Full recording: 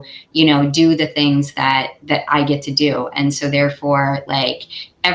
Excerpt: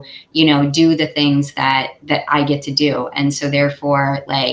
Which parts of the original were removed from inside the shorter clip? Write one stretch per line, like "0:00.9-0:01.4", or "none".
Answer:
none

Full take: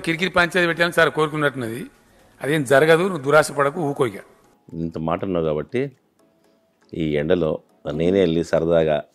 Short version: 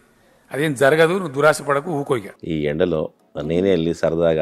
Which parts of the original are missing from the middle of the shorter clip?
0:04.2-0:06.8

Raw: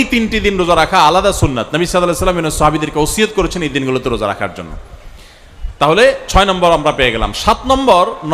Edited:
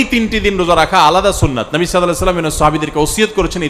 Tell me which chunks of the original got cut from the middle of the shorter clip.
none

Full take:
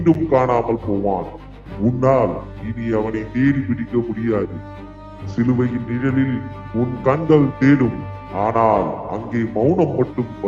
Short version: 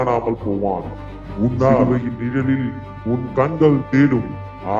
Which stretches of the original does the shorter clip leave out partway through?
0:02.2-0:05.5

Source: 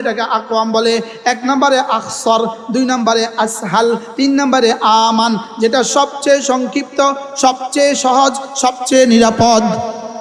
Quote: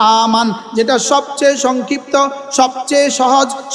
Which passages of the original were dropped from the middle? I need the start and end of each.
none

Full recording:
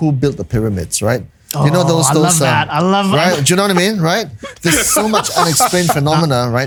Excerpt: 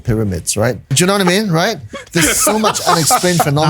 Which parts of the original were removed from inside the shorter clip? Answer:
0:01.4-0:03.4

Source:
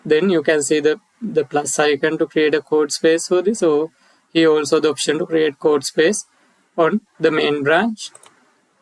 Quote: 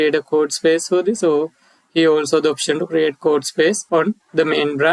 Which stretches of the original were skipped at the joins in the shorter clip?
0:06.2-0:06.7

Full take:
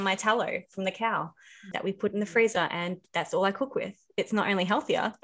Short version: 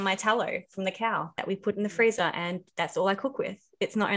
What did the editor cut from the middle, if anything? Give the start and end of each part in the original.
0:01.3-0:01.7

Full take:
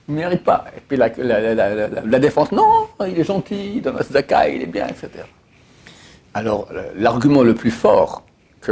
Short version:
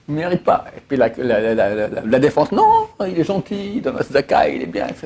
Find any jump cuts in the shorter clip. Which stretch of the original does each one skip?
none

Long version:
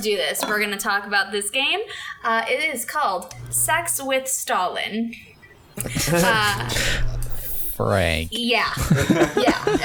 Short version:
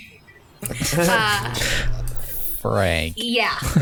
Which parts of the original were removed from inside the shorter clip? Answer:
none

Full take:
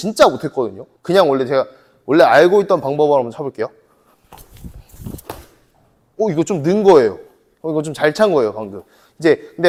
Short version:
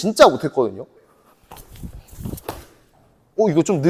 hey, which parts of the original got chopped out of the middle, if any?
0:01.0-0:03.8

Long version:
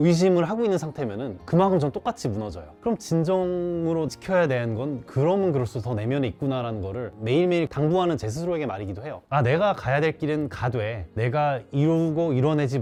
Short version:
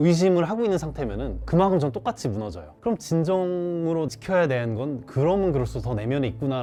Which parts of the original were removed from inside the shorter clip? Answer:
none

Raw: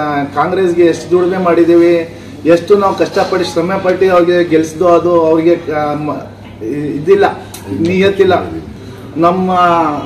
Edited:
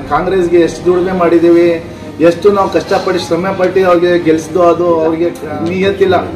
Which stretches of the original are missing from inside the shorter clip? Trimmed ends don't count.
0:05.7-0:07.6

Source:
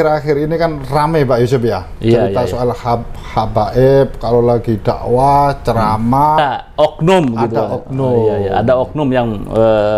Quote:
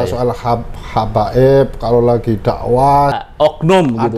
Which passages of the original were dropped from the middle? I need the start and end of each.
0:05.6-0:06.6

